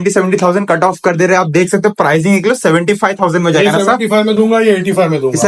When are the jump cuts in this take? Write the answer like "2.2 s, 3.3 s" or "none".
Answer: none